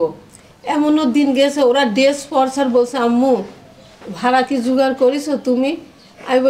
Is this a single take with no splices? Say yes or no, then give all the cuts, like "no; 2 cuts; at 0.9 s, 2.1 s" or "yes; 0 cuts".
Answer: yes; 0 cuts